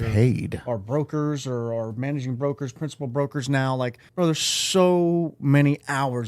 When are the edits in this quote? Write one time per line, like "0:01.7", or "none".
0:04.0